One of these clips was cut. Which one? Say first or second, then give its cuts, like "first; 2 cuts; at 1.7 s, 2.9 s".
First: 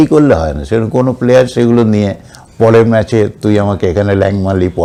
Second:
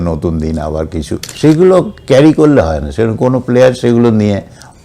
second; 1 cut; at 1.3 s